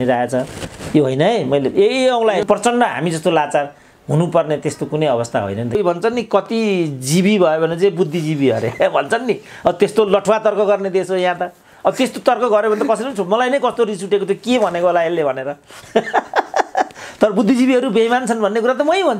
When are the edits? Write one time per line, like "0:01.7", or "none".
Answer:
0:02.4
0:05.8

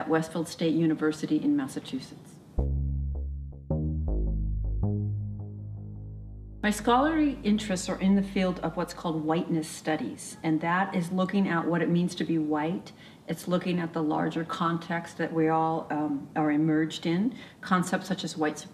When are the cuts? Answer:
0:14.6

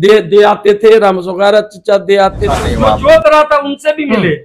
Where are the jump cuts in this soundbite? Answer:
0:02.4

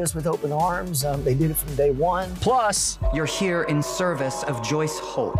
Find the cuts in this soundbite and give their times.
0:02.6

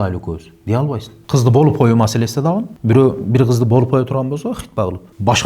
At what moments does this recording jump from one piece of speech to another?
0:01.2

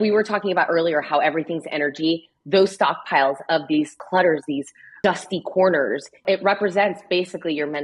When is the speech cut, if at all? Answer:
0:04.0
0:05.0
0:06.1

